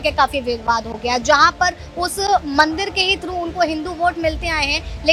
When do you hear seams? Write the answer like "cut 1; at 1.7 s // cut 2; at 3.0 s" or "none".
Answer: none